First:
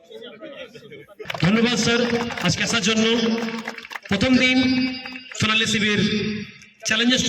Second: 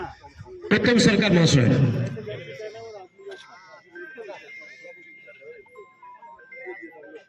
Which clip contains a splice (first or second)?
first